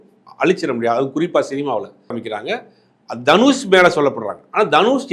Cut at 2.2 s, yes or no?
yes